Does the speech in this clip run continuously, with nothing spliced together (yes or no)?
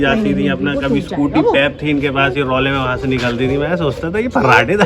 yes